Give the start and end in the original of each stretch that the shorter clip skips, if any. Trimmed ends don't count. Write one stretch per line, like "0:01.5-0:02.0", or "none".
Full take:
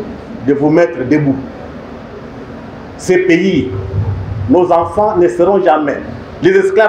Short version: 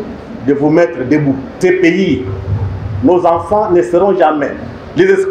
0:01.5-0:02.9